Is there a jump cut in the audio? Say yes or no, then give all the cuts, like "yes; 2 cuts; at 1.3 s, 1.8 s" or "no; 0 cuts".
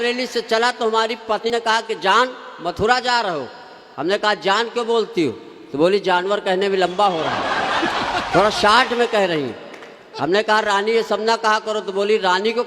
yes; 1 cut; at 1.5 s